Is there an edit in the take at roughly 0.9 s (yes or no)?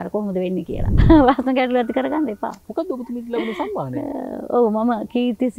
yes